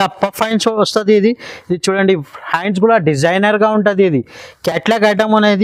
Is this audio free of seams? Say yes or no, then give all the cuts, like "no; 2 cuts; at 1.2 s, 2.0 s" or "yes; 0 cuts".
yes; 0 cuts